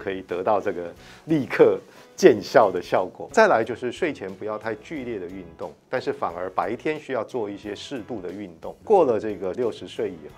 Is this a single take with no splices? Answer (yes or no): no